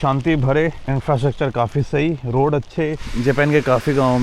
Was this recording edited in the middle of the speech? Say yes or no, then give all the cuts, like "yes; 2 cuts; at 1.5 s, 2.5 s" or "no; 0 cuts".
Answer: yes; 1 cut; at 3.0 s